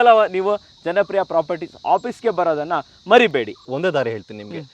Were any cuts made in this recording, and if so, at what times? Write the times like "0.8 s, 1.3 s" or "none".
3.6 s